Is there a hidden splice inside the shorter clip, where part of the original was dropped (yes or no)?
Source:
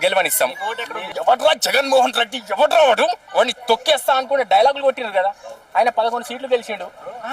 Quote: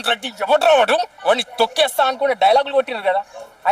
no